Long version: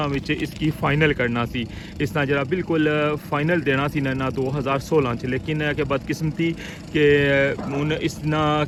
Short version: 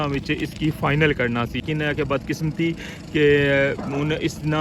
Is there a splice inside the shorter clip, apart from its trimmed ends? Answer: yes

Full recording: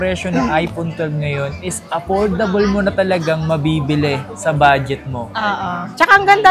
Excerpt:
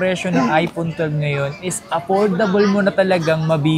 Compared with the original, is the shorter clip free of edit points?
yes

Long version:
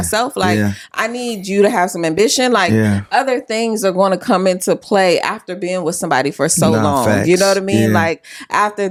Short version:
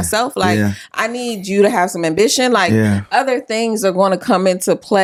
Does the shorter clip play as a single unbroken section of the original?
yes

